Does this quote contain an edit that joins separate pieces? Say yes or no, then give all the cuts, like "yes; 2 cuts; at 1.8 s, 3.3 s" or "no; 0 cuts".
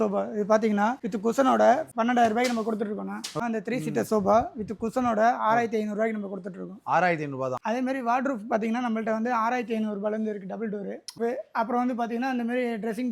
yes; 3 cuts; at 3.4 s, 7.6 s, 11.2 s